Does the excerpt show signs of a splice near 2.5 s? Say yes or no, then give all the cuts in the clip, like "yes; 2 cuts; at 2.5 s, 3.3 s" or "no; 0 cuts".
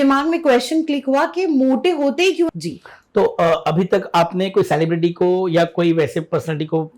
yes; 1 cut; at 2.5 s